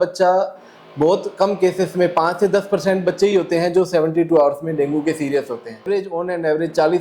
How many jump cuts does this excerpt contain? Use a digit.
1